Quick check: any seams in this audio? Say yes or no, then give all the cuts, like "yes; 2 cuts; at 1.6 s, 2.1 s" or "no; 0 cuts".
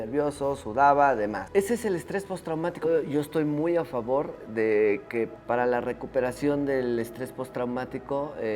yes; 1 cut; at 2.9 s